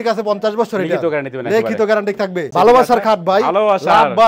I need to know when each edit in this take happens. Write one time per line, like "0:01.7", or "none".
0:02.4